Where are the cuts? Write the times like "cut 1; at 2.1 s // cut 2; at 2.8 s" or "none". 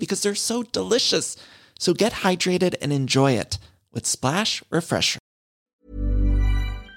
cut 1; at 5.8 s